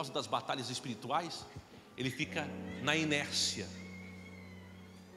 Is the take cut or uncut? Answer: uncut